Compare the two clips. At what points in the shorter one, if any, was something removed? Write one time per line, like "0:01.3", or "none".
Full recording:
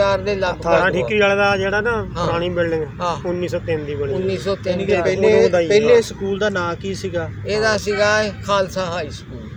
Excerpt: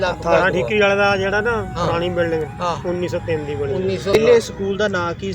0:04.2